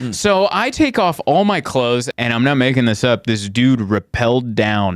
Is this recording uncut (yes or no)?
no